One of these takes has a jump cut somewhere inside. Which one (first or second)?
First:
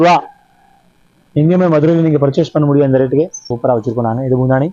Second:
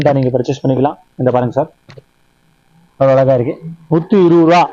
first